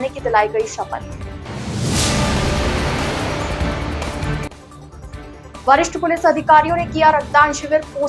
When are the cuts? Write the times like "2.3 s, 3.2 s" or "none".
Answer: none

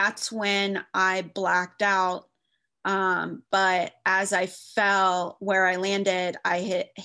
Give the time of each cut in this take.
none

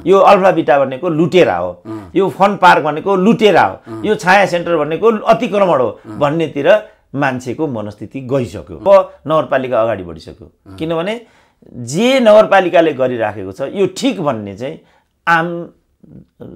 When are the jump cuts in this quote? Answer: 8.8 s

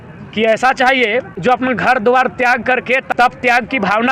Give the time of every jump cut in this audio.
1.3 s, 3.0 s

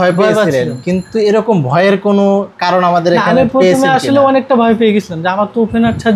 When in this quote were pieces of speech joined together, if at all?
none

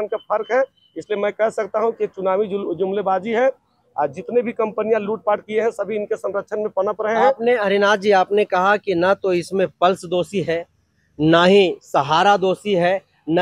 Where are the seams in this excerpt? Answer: none

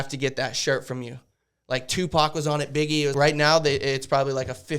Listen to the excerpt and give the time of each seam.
3.1 s

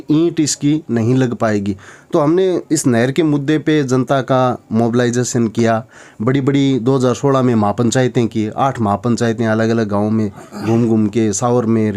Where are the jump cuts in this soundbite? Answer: none

